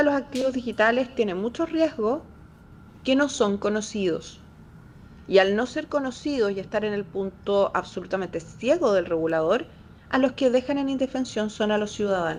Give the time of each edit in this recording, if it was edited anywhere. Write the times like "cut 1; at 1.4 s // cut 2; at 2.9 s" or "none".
none